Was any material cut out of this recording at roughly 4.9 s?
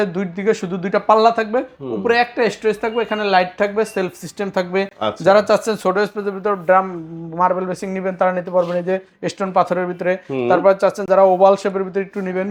no; 0 cuts

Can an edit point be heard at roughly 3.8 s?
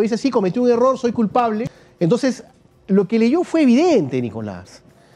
no; 1 cut; at 1.6 s

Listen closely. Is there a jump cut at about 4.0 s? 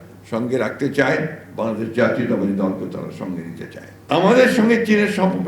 yes; 1 cut; at 4.0 s

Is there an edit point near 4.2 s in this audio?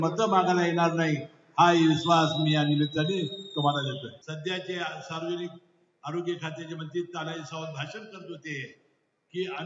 yes; 1 cut; at 4.2 s

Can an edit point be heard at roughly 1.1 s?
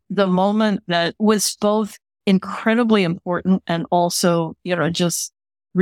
yes; 1 cut; at 1.1 s

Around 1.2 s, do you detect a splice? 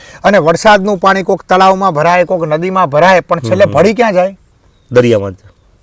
no; 0 cuts

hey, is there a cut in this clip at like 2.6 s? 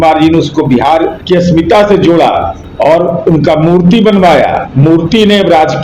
yes; 3 cuts; at 1.2 s, 2.6 s, 4.6 s

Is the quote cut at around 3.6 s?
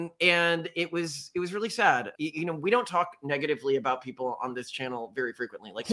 no; 1 cut; at 2.1 s

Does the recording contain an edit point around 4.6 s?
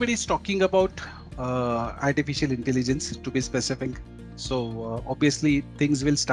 no; 0 cuts

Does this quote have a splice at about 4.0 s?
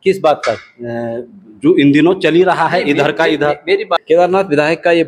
yes; 1 cut; at 4.0 s

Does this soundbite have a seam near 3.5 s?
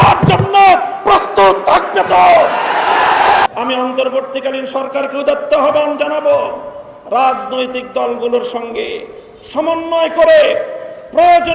yes; 1 cut; at 3.5 s

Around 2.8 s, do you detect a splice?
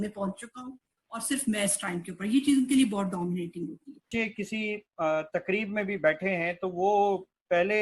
no; 1 cut; at 4.1 s

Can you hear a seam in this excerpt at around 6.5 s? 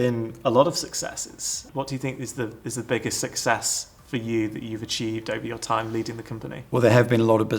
yes; 2 cuts; at 1.6 s, 6.5 s

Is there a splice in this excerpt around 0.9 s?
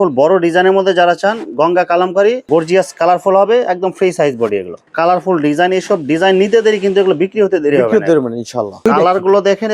no; 3 cuts; at 2.4 s, 4.9 s, 8.8 s

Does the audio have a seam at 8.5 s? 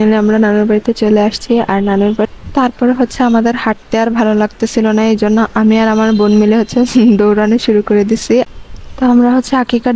yes; 2 cuts; at 2.3 s, 8.5 s

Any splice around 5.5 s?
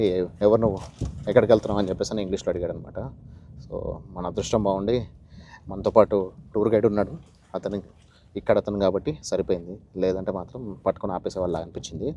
no; 0 cuts

